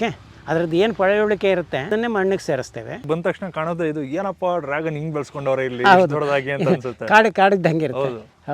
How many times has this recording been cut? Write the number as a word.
two